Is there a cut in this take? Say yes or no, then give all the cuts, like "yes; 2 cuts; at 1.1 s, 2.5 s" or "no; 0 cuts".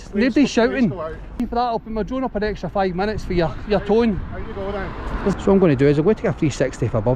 yes; 2 cuts; at 1.4 s, 5.3 s